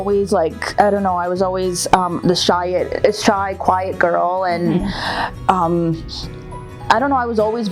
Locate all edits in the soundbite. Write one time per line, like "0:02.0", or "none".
none